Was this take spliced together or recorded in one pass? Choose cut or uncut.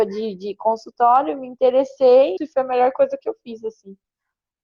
cut